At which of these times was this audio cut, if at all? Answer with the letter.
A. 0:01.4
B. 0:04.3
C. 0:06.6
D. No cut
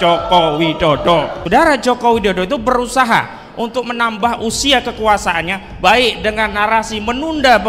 A